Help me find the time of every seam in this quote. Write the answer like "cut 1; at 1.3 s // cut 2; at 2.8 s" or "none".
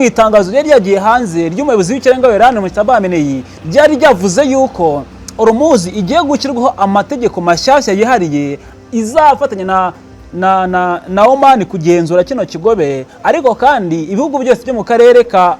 none